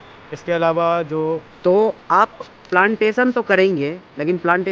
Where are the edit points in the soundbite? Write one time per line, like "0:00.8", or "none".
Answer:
0:01.5